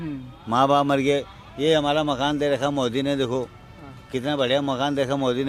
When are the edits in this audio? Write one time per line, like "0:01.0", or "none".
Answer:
none